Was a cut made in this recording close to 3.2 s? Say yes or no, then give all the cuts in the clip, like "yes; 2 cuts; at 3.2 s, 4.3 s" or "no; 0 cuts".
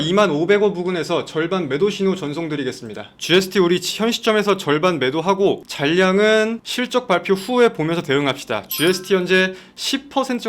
no; 1 cut; at 5.7 s